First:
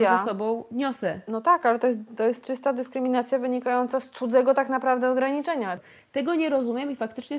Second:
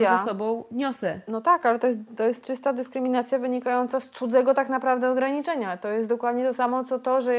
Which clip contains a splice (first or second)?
first